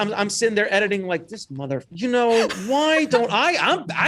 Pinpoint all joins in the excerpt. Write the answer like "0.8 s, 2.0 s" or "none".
none

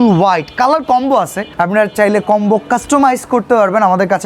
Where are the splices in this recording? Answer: 1.4 s

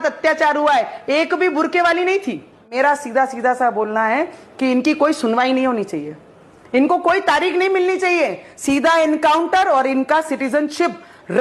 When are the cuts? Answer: 2.7 s

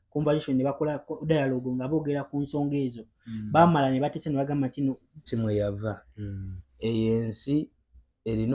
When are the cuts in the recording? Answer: 5.3 s

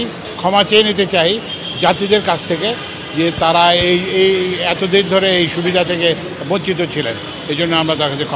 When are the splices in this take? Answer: none

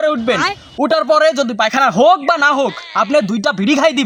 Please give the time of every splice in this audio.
none

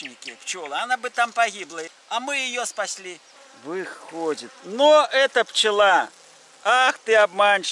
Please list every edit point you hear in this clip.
2.0 s, 3.3 s

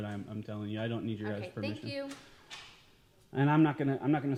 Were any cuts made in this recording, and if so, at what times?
none

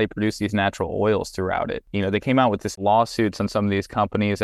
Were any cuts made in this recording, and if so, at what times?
1.8 s, 2.7 s

